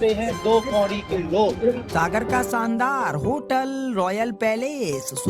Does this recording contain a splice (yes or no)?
yes